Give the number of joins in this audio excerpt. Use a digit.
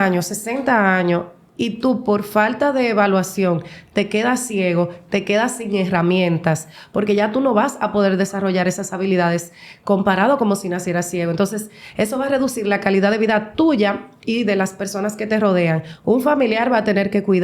0